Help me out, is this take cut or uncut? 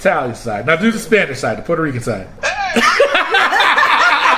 cut